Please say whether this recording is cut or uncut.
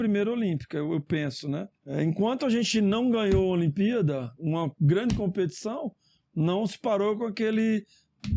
cut